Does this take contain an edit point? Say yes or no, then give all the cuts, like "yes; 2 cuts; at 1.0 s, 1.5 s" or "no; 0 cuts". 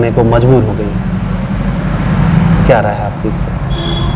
no; 0 cuts